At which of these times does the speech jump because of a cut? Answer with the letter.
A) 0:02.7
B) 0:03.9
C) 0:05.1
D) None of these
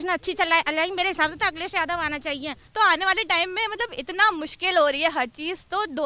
A